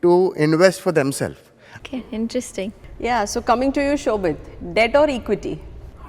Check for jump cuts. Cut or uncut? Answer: uncut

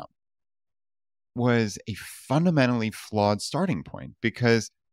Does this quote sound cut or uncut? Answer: cut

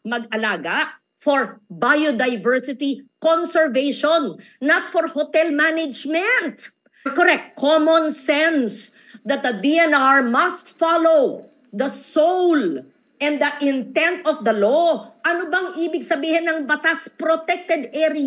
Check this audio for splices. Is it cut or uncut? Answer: cut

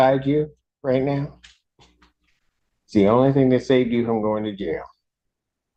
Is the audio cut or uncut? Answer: uncut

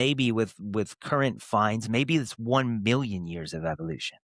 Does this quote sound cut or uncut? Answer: uncut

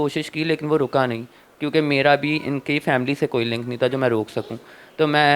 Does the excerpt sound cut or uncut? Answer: uncut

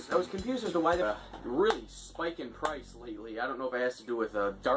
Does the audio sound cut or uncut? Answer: uncut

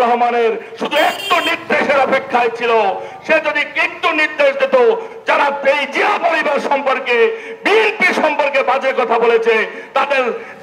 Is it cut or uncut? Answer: uncut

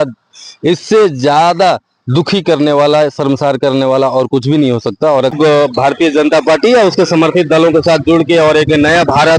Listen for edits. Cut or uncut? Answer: cut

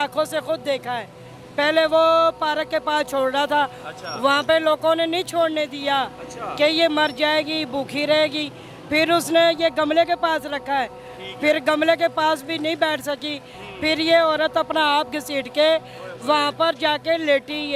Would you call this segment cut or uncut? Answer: uncut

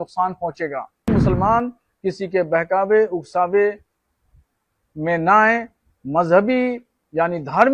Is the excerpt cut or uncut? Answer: cut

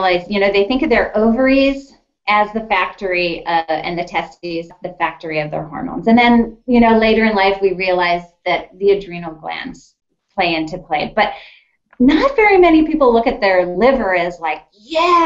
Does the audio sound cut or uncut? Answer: cut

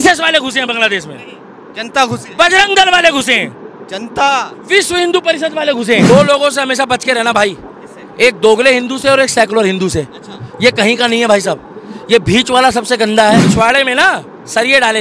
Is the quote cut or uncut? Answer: cut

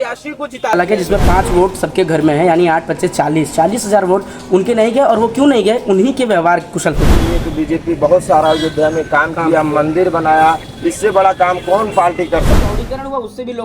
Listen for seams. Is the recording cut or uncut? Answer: cut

